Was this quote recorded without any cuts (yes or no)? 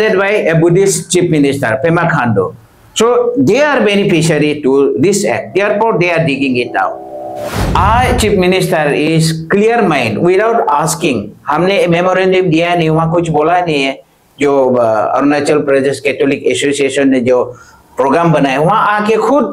no